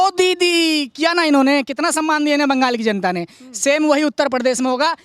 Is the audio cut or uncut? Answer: uncut